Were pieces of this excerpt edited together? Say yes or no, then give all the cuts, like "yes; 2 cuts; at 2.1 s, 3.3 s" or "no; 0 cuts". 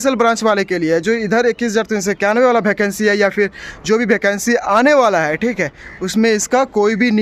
no; 0 cuts